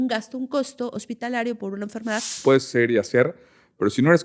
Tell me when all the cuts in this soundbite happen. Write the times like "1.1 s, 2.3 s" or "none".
2.3 s

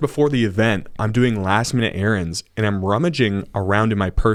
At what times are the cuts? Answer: none

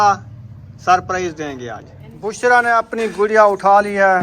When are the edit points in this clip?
2.4 s

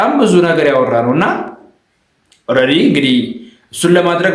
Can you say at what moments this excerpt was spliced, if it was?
none

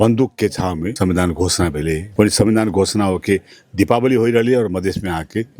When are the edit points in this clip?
0.9 s, 2.1 s

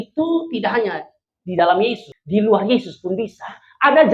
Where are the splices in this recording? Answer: 2.1 s

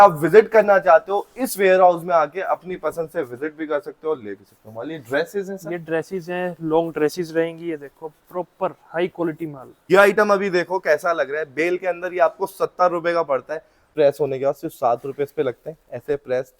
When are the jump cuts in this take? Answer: 9.8 s, 13.9 s

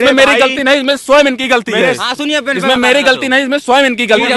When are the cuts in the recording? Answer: none

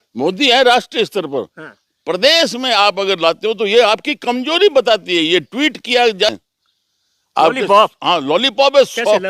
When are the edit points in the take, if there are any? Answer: 6.3 s

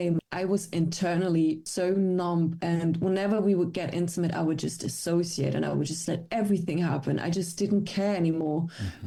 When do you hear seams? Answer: none

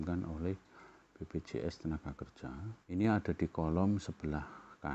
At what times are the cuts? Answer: 2.7 s

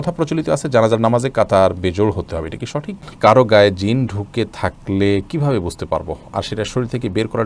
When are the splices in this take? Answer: 2.9 s

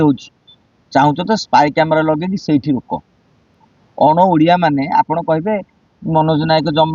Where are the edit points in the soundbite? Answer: none

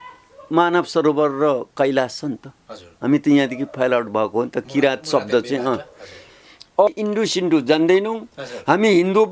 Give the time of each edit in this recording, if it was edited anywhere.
6.9 s

